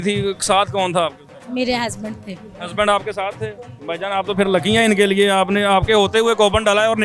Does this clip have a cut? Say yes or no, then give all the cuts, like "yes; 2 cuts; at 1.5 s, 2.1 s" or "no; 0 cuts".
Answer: no; 0 cuts